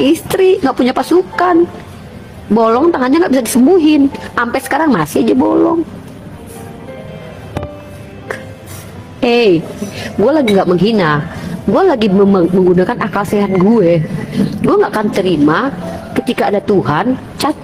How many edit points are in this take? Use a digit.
0